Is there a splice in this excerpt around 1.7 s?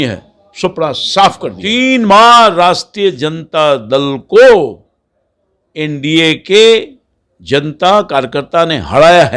yes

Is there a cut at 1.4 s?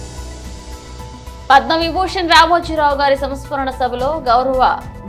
no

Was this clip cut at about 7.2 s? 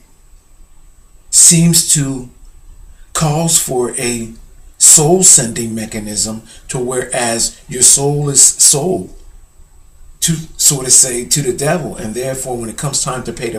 no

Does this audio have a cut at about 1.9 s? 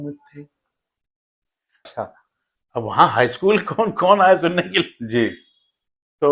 yes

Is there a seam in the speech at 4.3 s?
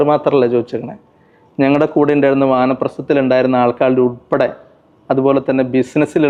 no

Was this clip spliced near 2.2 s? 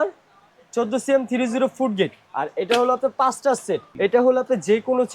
yes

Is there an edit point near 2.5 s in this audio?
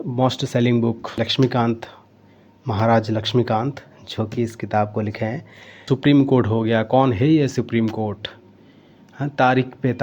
no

